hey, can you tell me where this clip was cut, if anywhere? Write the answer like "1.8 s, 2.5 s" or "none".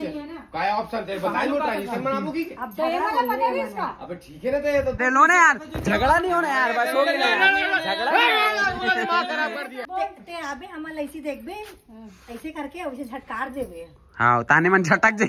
5.0 s, 9.9 s

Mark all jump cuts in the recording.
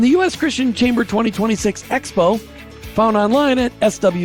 none

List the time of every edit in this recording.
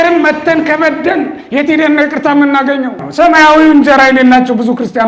3.0 s

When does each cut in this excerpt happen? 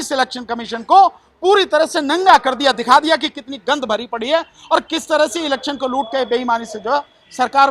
none

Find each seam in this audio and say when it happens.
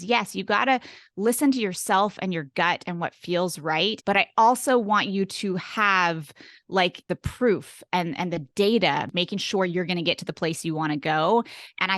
4.0 s, 9.1 s

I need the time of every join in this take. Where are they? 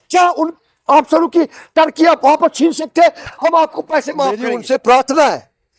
4.4 s

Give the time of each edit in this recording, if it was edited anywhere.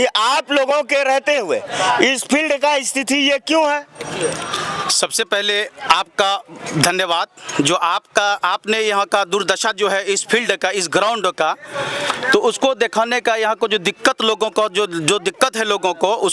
none

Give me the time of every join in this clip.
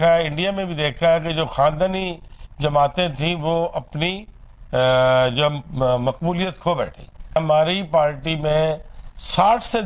7.4 s

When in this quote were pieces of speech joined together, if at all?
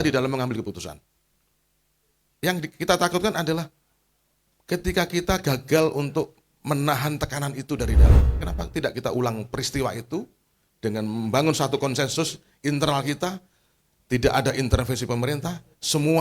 8.3 s

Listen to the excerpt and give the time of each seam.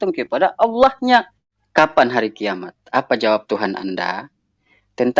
1.3 s

